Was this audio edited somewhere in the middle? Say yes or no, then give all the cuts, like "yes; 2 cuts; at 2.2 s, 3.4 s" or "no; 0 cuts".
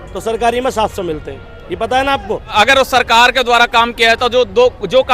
yes; 1 cut; at 2.5 s